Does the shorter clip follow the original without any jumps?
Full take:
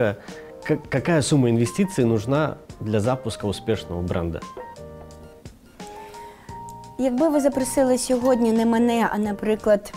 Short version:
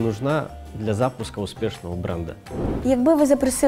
no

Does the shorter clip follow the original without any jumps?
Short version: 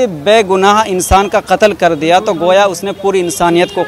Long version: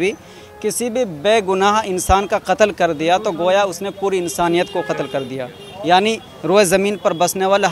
yes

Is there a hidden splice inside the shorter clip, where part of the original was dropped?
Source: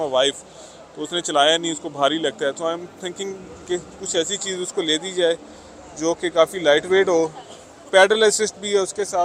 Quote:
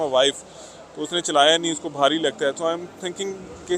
no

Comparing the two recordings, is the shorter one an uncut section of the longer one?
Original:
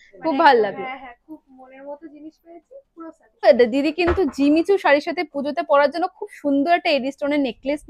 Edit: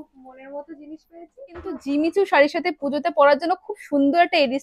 no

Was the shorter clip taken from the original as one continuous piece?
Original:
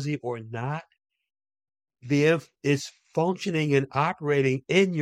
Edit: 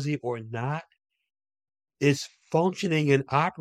no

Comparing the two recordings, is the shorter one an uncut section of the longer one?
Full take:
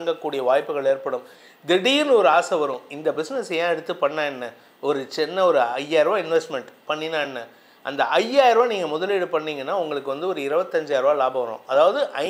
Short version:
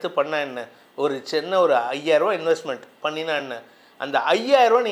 yes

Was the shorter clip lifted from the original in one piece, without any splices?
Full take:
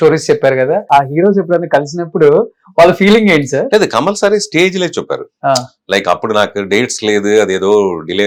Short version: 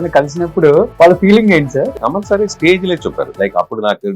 no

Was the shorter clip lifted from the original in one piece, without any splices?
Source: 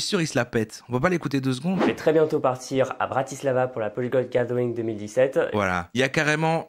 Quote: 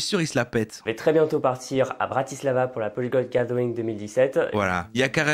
no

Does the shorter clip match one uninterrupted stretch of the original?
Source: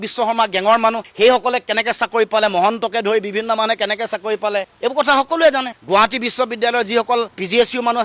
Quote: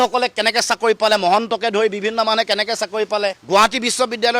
no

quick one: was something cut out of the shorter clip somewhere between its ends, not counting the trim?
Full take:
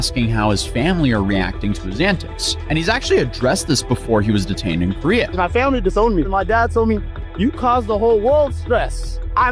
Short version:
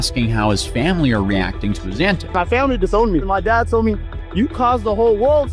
yes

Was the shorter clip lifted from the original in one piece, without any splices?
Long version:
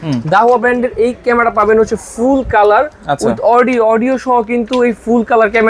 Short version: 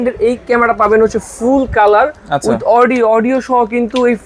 yes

